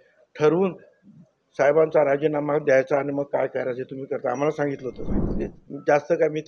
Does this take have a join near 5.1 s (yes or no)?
yes